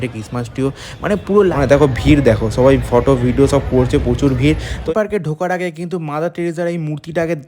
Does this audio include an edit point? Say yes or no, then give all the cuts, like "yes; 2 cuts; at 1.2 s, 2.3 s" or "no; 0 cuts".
yes; 2 cuts; at 1.5 s, 4.8 s